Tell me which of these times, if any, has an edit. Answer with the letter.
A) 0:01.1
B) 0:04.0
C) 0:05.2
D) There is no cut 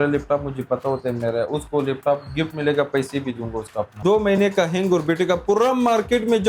B